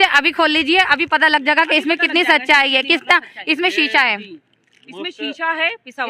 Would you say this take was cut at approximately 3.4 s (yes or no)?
no